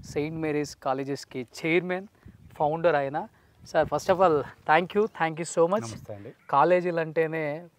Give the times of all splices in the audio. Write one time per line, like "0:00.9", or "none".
0:06.3

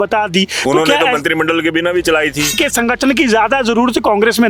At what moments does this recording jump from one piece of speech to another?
0:02.5

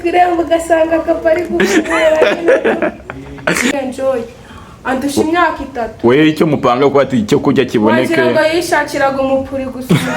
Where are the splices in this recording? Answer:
0:03.7

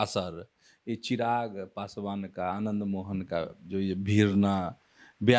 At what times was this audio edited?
none

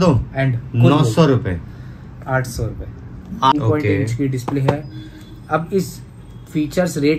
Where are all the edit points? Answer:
0:03.5

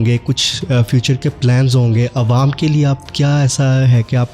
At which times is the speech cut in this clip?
none

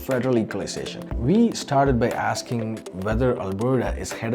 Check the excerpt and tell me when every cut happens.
0:00.9

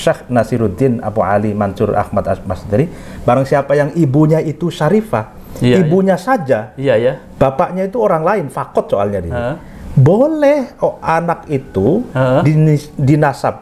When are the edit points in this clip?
none

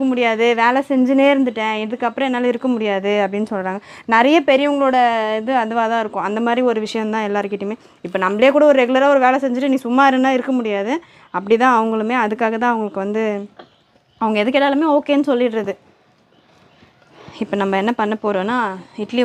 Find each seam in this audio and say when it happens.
none

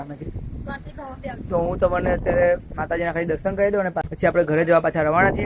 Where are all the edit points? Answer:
0:04.1

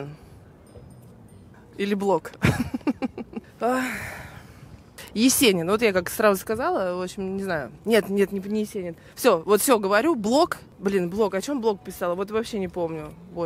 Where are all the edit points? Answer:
0:01.5

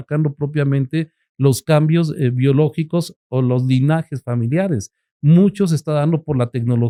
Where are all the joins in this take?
none

